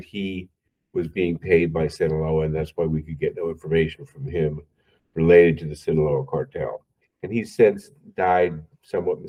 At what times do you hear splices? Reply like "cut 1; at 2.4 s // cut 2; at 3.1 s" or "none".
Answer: none

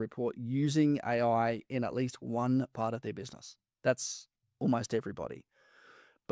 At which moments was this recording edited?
none

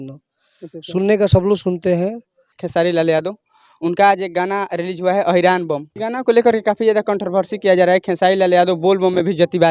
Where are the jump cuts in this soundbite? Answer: cut 1; at 2.5 s // cut 2; at 5.9 s

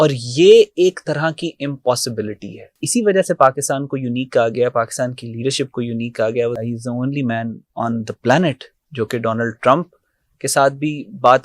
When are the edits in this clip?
cut 1; at 2.7 s // cut 2; at 6.6 s

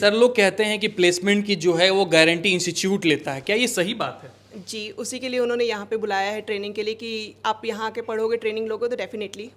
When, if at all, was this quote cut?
none

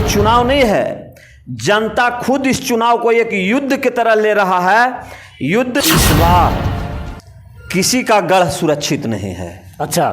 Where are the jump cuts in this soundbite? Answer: cut 1; at 5.8 s

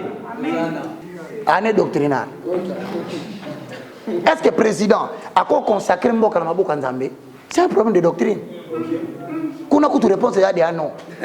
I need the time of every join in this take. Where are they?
cut 1; at 1.1 s

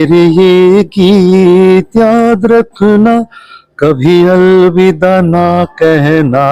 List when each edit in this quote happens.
none

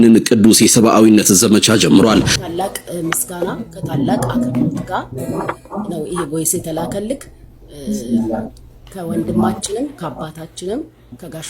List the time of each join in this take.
cut 1; at 2.4 s

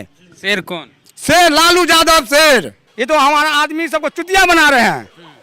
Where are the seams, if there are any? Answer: cut 1; at 2.8 s

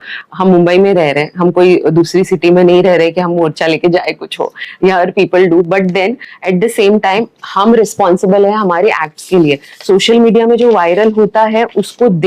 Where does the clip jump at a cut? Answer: none

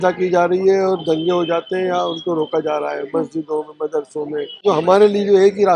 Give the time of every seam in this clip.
cut 1; at 4.6 s

